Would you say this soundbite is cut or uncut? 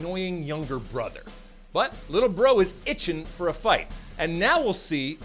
uncut